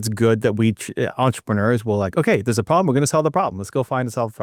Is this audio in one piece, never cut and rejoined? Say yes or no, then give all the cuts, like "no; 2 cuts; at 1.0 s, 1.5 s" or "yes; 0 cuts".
yes; 0 cuts